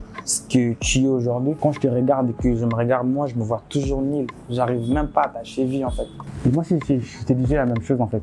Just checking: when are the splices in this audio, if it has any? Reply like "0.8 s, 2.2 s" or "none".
1.6 s